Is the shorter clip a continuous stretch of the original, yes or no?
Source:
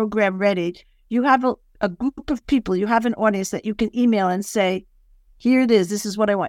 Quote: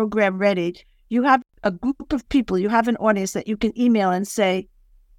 no